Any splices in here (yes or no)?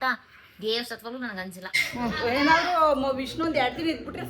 yes